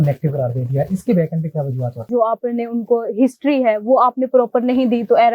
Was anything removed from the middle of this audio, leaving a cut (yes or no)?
yes